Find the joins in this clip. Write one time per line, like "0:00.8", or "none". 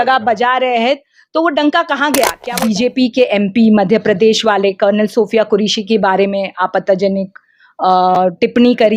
0:02.4